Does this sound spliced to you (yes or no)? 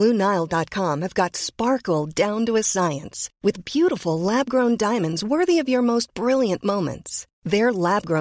no